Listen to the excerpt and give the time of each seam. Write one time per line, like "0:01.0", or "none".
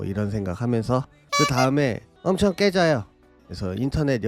0:03.3

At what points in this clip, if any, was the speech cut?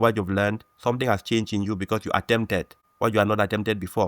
0:02.8

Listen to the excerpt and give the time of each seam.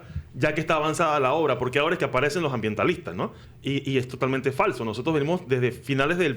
0:03.5

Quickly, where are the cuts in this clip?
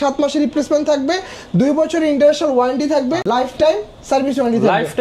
0:03.2

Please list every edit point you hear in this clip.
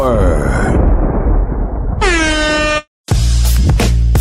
0:02.8

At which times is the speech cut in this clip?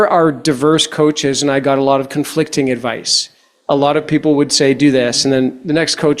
none

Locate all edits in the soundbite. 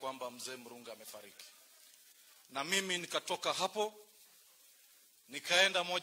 none

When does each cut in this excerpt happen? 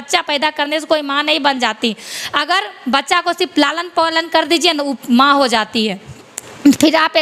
none

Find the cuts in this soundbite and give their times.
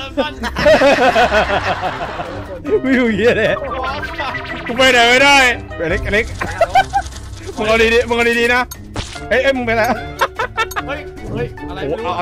0:05.6

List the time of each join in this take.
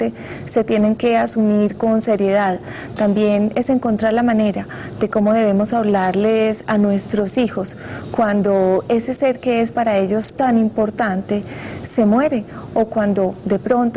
0:07.6

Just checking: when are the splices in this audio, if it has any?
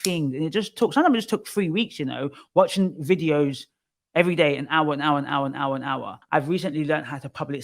0:06.2

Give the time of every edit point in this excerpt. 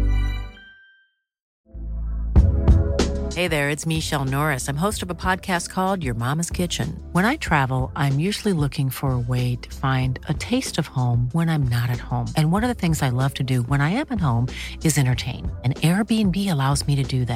0:01.6

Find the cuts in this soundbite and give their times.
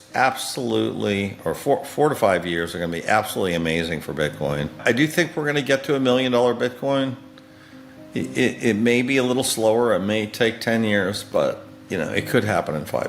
0:04.8

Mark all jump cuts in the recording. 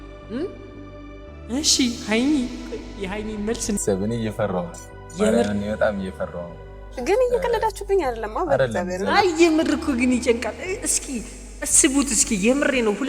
0:03.8

